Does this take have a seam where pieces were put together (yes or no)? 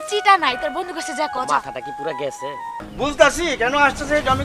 yes